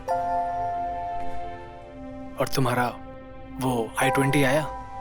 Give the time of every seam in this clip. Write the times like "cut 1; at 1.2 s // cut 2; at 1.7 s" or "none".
cut 1; at 1.6 s

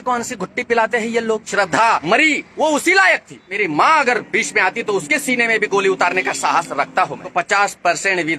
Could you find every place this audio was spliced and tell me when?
cut 1; at 1.8 s // cut 2; at 3.6 s // cut 3; at 7.2 s

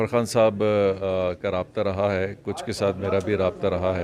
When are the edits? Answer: none

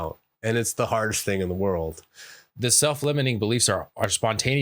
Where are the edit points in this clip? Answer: none

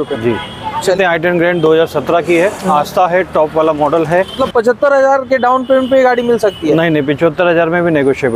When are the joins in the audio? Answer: cut 1; at 1.0 s // cut 2; at 4.4 s

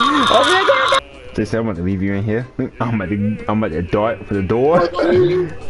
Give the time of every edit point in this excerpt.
cut 1; at 1.0 s

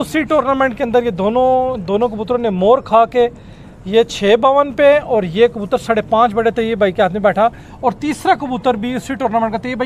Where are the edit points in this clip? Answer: none

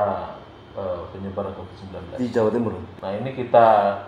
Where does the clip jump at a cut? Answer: cut 1; at 2.9 s

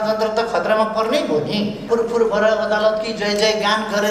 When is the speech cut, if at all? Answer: cut 1; at 1.8 s

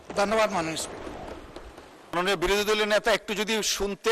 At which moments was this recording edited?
cut 1; at 2.1 s

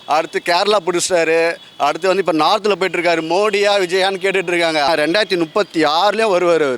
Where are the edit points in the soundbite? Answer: cut 1; at 4.9 s

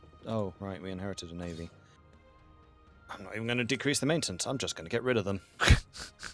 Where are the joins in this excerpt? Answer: none

